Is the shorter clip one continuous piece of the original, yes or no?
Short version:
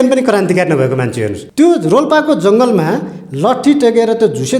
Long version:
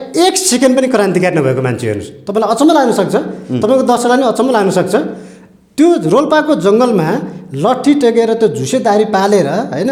no